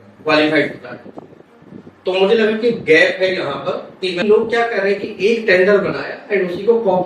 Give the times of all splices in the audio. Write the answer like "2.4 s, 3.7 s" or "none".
4.2 s